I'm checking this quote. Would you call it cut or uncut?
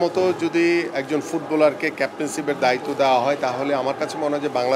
uncut